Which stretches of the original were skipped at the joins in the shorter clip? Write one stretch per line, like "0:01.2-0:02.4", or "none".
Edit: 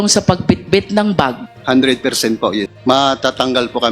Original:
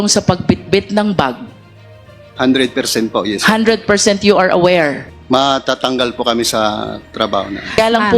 0:01.5-0:02.2
0:03.4-0:05.1